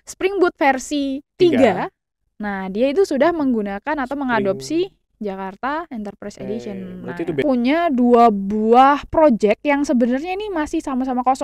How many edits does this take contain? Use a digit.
2